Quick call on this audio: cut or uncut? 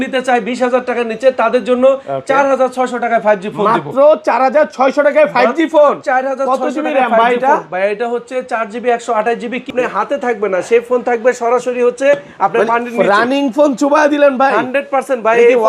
cut